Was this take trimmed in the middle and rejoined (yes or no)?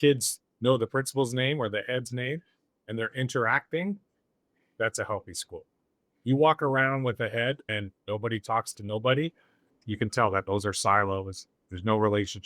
yes